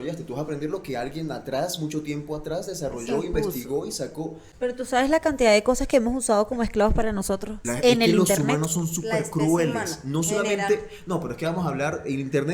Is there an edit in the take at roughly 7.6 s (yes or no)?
yes